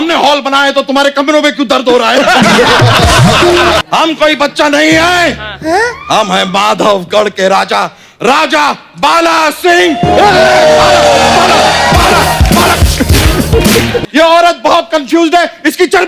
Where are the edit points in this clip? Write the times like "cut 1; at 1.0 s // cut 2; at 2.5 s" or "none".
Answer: cut 1; at 3.8 s // cut 2; at 14.0 s